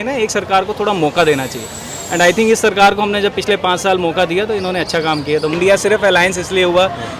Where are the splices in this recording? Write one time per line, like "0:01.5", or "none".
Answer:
0:05.5